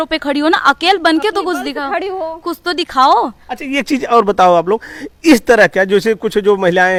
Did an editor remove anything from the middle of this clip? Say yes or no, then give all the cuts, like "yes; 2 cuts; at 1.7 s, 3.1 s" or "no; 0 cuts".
no; 0 cuts